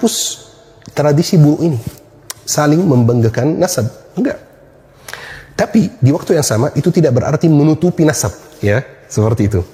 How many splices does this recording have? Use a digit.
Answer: 0